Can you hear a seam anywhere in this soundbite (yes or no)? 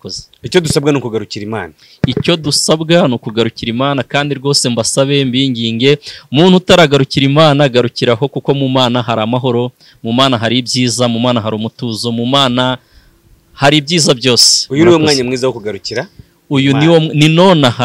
no